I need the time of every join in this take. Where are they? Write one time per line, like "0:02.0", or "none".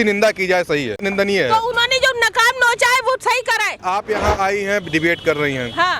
0:01.0
0:03.8

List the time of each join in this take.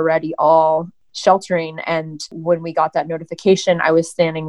0:01.0
0:02.3

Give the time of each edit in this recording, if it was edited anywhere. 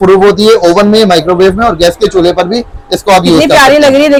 none

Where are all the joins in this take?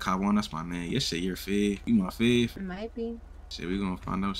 0:01.8
0:02.5

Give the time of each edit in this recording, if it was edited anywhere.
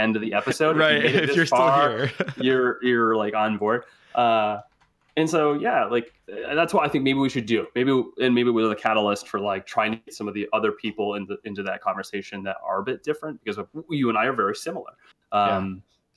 none

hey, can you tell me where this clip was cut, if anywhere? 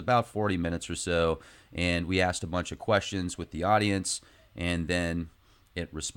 0:02.4

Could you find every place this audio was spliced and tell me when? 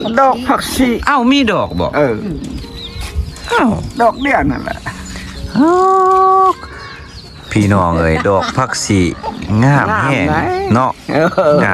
none

